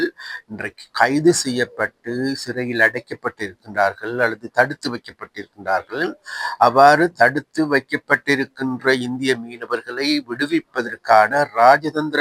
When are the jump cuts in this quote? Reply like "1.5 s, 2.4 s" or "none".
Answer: none